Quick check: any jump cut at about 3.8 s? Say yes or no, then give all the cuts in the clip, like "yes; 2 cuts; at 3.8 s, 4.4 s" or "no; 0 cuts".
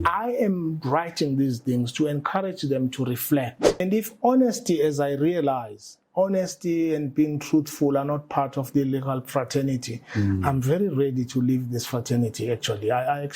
yes; 1 cut; at 3.8 s